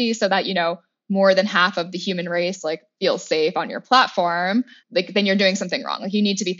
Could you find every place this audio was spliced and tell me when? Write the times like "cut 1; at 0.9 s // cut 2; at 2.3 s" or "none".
none